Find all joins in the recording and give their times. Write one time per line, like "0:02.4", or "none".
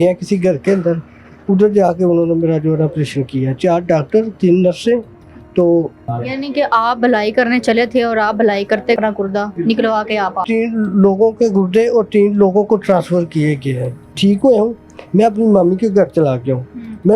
0:06.1
0:09.0
0:10.4
0:14.1